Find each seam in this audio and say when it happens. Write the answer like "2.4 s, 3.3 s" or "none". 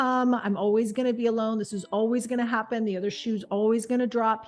none

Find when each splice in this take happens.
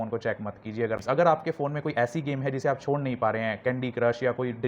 1.0 s

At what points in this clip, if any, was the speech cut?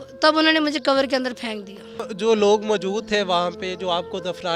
2.1 s

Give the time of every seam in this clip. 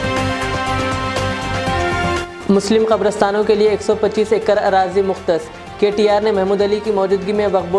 2.3 s

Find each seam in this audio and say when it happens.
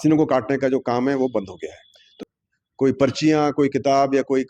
2.2 s

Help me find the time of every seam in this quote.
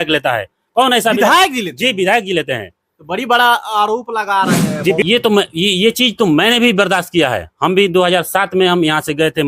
5.0 s

